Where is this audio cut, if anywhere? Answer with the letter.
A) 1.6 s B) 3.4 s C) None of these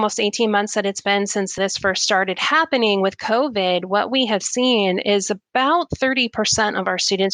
A